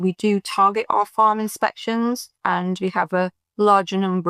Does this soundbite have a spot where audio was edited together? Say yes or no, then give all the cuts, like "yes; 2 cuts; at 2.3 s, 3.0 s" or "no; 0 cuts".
no; 0 cuts